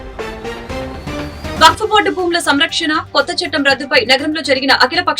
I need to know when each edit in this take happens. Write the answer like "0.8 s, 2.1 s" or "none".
1.5 s

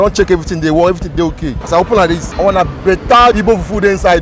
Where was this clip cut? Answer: 1.5 s, 2.3 s

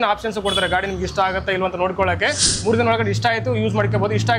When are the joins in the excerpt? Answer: none

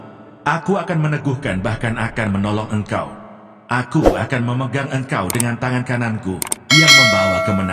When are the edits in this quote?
none

